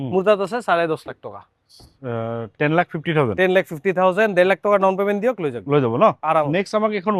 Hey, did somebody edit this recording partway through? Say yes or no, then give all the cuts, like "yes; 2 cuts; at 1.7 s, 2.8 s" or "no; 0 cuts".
no; 0 cuts